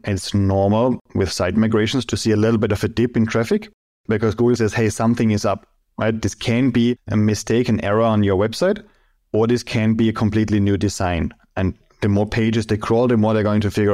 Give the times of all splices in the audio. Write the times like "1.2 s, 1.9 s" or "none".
1.1 s, 7.0 s